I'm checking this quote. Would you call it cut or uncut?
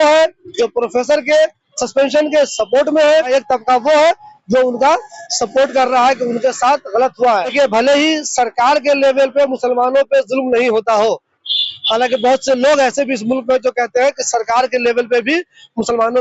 cut